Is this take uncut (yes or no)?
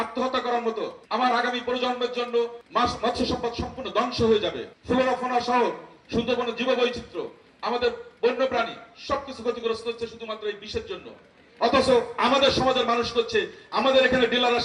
no